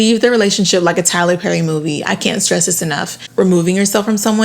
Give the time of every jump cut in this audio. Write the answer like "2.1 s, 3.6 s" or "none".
3.2 s